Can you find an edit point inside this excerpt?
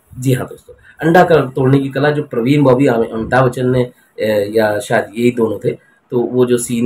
no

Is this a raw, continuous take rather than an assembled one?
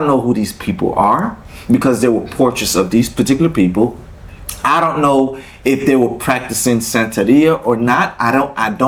yes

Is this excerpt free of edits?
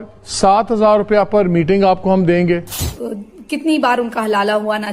no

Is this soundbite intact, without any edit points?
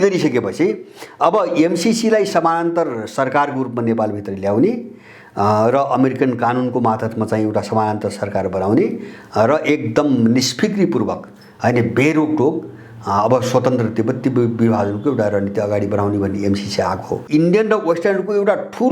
no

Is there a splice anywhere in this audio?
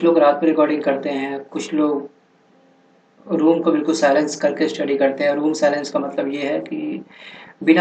no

